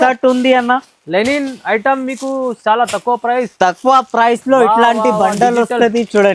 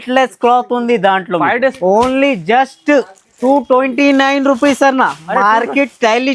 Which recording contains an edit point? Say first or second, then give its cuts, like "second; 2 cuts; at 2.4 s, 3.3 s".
second; 1 cut; at 1.8 s